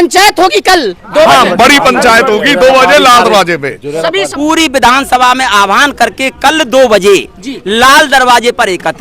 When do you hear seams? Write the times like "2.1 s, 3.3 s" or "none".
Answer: 4.3 s